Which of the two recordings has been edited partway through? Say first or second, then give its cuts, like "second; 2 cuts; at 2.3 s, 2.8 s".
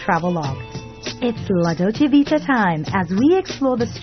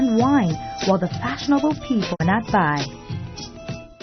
second; 1 cut; at 2.2 s